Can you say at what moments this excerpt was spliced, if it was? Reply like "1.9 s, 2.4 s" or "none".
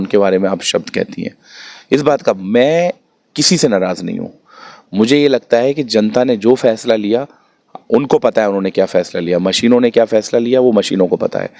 none